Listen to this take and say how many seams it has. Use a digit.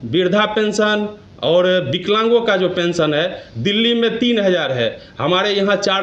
0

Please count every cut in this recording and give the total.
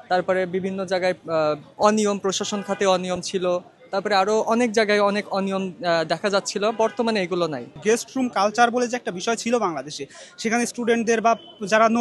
1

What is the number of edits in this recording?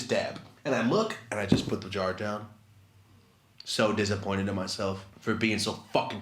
1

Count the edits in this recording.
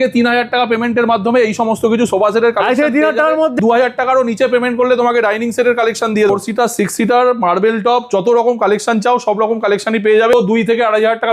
3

